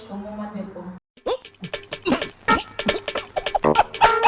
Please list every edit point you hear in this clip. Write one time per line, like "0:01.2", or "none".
0:01.0